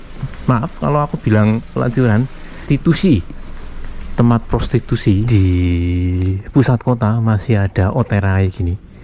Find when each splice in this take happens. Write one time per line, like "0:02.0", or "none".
0:02.6
0:05.3